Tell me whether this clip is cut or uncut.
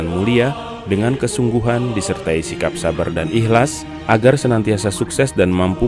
uncut